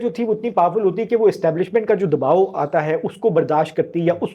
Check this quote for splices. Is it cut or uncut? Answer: uncut